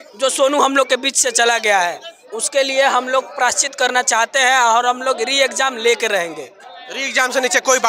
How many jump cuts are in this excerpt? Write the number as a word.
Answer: zero